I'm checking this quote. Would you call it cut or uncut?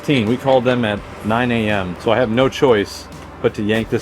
cut